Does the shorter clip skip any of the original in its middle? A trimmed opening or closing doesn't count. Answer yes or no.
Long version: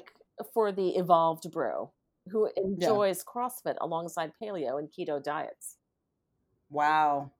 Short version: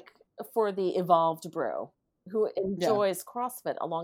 no